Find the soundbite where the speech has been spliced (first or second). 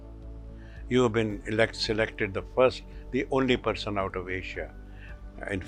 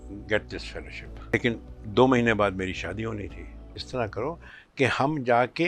second